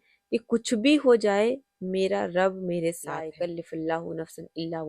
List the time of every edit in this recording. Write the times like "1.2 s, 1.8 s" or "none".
3.2 s